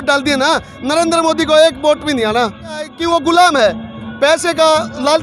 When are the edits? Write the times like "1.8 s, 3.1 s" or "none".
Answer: 2.9 s